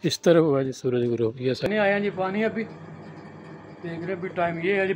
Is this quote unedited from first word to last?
no; 1 cut; at 1.7 s

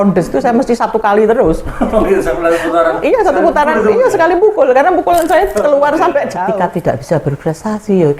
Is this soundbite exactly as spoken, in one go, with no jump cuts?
no; 1 cut; at 6.4 s

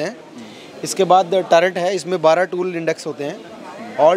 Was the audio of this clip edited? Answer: no; 0 cuts

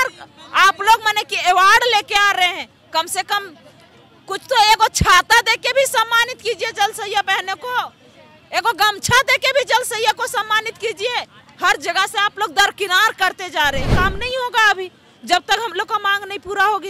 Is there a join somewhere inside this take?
yes; 1 cut; at 13.9 s

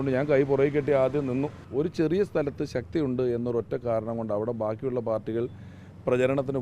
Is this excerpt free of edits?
no; 1 cut; at 1.6 s

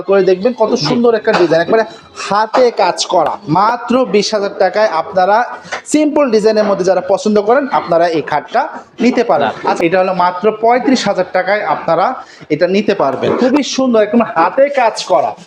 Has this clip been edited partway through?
yes; 3 cuts; at 3.4 s, 9.6 s, 13.4 s

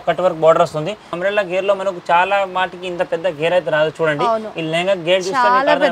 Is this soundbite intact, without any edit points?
no; 1 cut; at 1.1 s

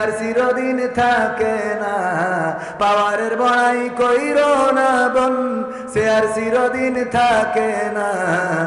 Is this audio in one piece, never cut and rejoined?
yes; 0 cuts

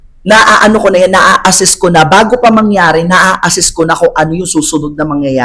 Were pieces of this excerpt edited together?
no; 0 cuts

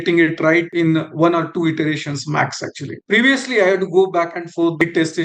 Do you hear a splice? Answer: no; 0 cuts

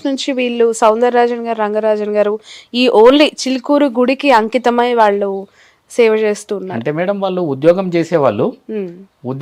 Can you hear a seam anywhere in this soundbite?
no; 0 cuts

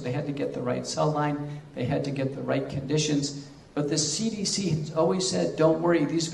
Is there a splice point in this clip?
yes; 1 cut; at 4.4 s

